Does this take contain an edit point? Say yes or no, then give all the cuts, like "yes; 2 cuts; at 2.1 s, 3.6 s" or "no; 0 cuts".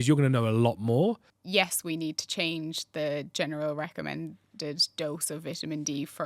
yes; 1 cut; at 1.3 s